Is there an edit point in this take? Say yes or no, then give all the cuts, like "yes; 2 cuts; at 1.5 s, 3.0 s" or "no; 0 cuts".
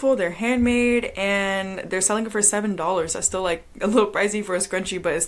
no; 0 cuts